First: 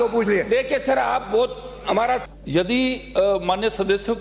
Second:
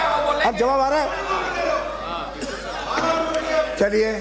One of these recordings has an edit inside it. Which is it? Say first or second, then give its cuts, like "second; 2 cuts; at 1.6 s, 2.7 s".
first; 1 cut; at 2.2 s